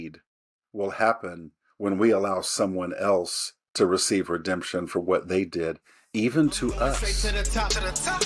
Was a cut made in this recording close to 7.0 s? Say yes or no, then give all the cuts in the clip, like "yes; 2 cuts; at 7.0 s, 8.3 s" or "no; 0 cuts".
yes; 1 cut; at 7.0 s